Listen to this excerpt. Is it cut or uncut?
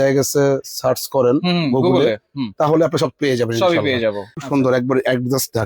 cut